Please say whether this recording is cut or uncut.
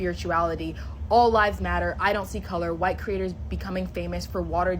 uncut